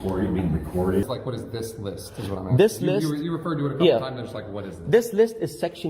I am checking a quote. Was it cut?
yes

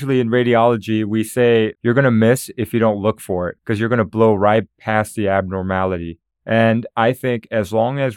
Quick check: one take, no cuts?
no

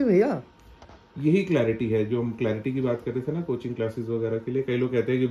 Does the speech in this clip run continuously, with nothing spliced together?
yes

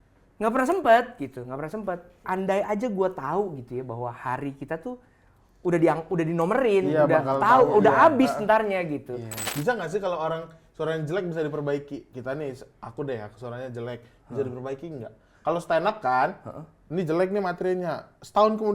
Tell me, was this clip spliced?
yes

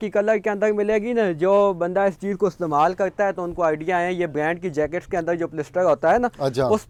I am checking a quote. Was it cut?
no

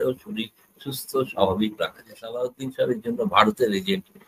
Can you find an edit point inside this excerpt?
yes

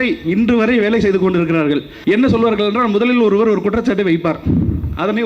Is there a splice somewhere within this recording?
yes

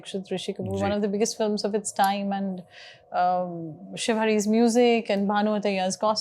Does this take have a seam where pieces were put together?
no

